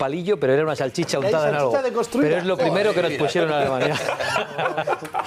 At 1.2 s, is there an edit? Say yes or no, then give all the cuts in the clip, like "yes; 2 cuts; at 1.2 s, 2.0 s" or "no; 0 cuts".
yes; 1 cut; at 1.2 s